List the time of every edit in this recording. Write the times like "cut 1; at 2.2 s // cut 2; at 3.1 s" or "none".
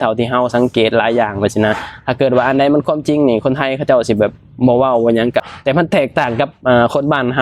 none